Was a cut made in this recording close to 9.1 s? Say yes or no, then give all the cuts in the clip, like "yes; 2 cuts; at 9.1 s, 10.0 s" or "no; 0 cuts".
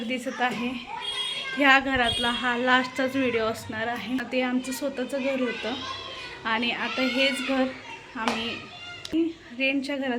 yes; 2 cuts; at 4.3 s, 9.1 s